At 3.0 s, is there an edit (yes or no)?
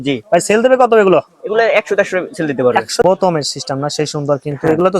yes